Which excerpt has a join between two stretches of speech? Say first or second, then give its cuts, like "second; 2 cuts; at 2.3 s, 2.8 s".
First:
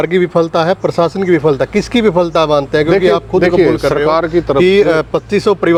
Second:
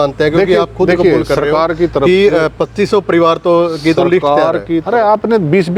second; 1 cut; at 4.8 s